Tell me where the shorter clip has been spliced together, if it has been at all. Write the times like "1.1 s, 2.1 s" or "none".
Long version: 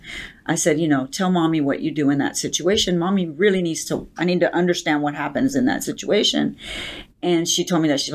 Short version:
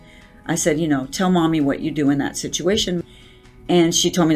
3.0 s